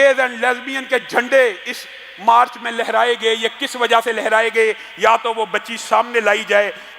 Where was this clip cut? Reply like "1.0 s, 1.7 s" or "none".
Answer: none